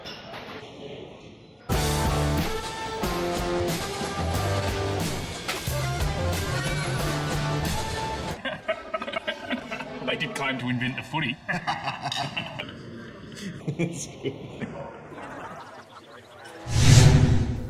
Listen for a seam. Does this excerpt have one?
yes; 1 cut; at 16.8 s

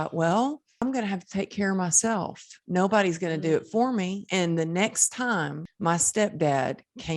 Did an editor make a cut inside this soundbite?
yes; 3 cuts; at 0.8 s, 4.2 s, 5.6 s

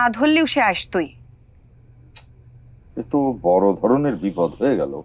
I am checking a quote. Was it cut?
no; 0 cuts

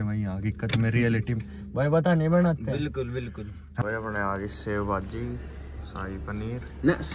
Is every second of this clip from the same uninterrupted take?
no; 1 cut; at 3.7 s

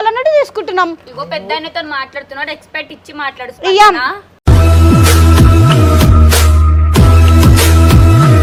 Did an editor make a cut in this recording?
no; 0 cuts

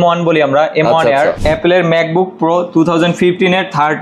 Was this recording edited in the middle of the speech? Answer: yes; 1 cut; at 1.4 s

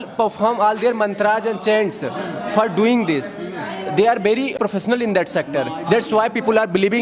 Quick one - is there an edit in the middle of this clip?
yes; 1 cut; at 4.6 s

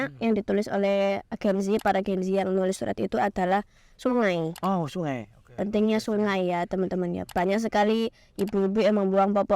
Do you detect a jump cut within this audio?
no; 0 cuts

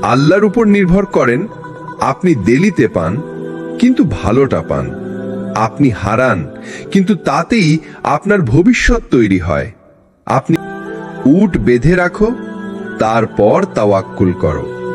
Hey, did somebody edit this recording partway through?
yes; 1 cut; at 10.6 s

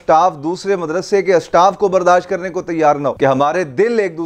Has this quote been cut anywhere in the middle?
yes; 1 cut; at 3.1 s

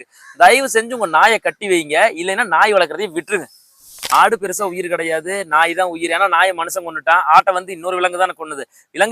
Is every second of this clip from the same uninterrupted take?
no; 1 cut; at 4.1 s

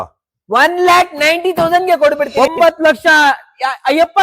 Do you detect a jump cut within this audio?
yes; 1 cut; at 2.3 s

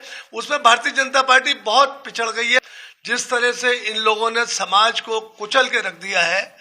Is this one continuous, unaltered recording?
no; 1 cut; at 2.6 s

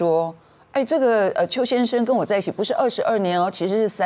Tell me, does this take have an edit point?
no; 0 cuts

